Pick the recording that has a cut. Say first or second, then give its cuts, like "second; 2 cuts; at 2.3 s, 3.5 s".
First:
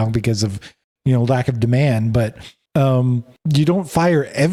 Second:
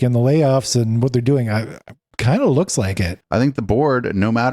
second; 1 cut; at 3.1 s